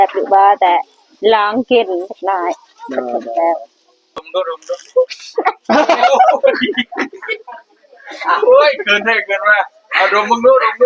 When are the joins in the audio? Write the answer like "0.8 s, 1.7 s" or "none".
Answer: 4.3 s